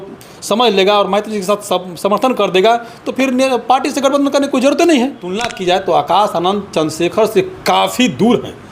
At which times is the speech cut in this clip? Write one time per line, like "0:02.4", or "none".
0:05.5